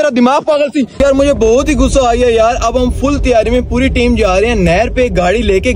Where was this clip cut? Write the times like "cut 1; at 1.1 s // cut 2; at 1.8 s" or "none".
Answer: cut 1; at 1.0 s